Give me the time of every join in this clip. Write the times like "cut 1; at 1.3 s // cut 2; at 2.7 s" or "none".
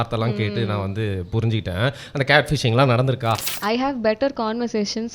cut 1; at 3.5 s